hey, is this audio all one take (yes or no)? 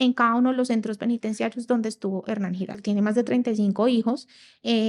no